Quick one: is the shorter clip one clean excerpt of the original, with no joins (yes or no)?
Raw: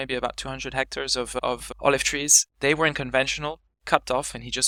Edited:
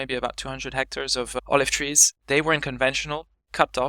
no